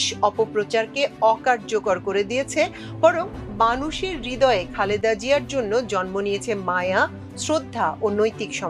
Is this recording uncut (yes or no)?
yes